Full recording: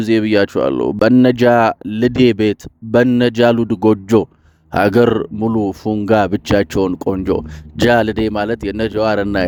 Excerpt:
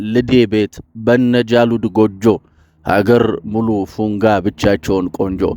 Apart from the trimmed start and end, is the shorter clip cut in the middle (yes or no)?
no